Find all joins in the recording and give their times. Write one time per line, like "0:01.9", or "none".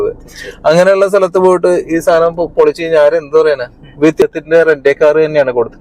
0:04.2